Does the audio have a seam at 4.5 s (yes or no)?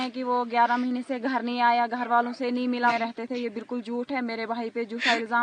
no